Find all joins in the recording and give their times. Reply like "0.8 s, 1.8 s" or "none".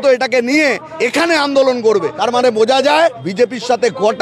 0.9 s, 2.2 s, 3.2 s